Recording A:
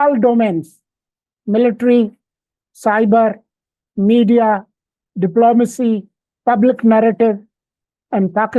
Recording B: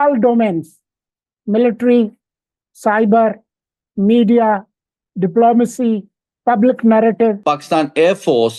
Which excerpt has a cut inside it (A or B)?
B